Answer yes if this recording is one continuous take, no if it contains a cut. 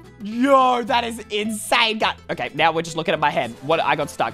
yes